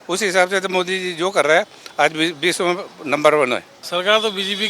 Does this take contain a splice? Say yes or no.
yes